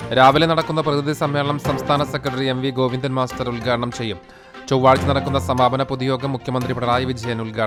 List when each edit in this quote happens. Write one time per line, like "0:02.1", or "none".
none